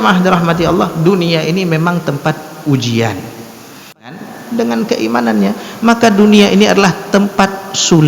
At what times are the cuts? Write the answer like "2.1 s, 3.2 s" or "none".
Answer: 4.2 s

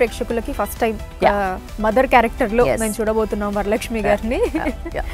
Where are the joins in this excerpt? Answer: none

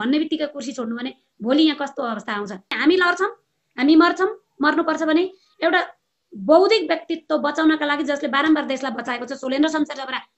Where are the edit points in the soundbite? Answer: 2.8 s

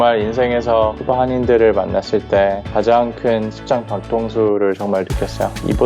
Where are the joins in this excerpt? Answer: none

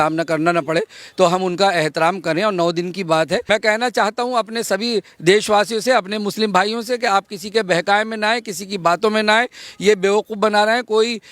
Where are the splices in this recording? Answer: 3.4 s

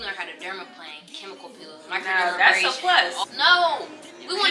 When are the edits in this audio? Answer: 3.2 s

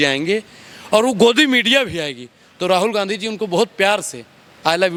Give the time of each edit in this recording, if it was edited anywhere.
none

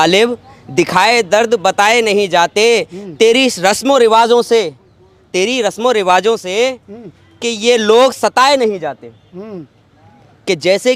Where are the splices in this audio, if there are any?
none

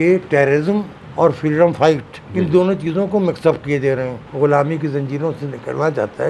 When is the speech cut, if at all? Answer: 1.0 s, 2.2 s, 4.2 s

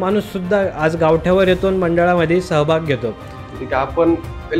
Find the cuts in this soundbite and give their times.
3.6 s

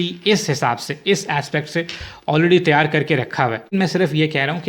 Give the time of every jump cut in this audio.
3.7 s

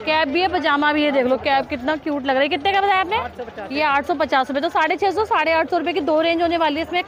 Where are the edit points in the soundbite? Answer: none

